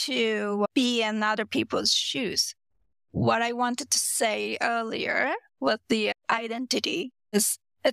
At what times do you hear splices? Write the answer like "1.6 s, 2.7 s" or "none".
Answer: none